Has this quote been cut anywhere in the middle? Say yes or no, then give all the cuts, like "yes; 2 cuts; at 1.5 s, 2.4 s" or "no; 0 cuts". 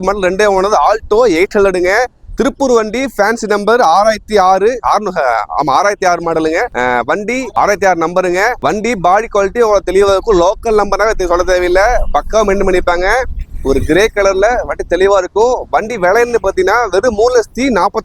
no; 0 cuts